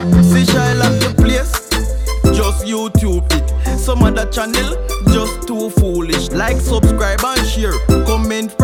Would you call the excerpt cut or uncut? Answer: uncut